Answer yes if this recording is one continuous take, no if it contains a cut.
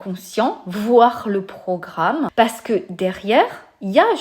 no